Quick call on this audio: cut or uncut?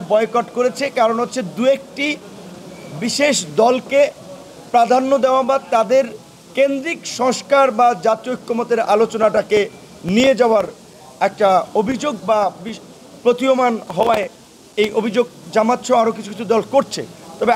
uncut